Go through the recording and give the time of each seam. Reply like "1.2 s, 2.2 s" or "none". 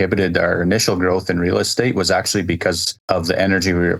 2.9 s